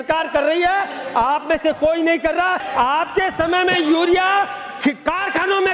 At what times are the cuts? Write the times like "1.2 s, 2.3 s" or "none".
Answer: 2.6 s